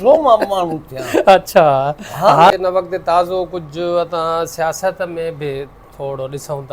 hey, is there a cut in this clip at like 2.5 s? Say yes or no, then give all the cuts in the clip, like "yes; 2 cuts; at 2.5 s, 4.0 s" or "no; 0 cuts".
yes; 1 cut; at 2.5 s